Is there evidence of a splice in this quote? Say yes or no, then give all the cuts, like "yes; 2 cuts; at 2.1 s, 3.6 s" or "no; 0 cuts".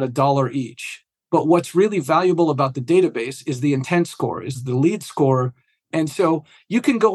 yes; 2 cuts; at 4.6 s, 5.8 s